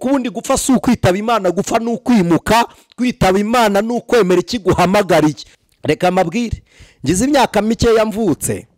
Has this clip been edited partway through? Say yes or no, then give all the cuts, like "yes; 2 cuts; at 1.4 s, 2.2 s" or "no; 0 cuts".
yes; 1 cut; at 5.5 s